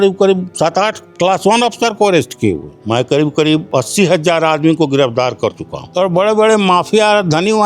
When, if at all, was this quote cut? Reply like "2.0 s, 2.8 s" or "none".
2.7 s, 5.8 s